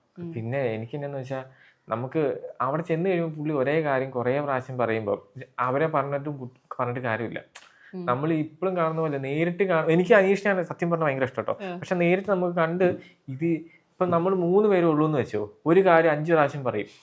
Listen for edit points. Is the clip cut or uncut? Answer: uncut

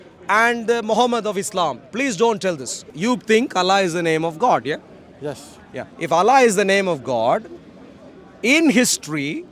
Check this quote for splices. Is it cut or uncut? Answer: cut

